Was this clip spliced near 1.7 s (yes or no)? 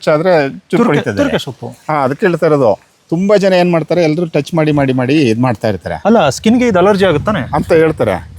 no